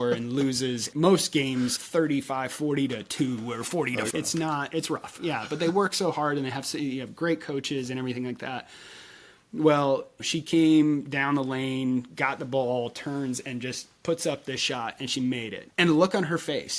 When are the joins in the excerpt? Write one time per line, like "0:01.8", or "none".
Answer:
0:00.9
0:15.6